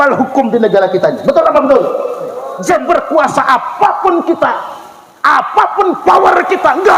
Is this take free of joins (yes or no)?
no